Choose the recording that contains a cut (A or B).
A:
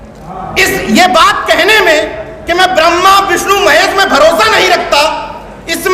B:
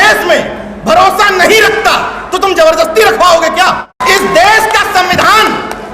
B